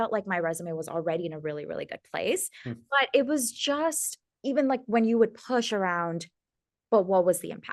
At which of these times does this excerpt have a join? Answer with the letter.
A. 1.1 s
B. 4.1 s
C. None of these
C